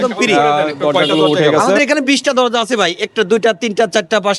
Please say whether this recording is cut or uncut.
cut